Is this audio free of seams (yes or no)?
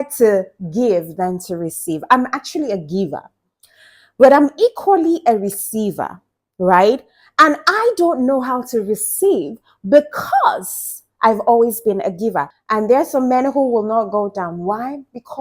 no